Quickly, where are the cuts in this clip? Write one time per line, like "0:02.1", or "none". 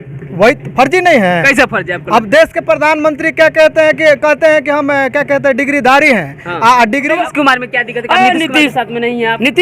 0:07.2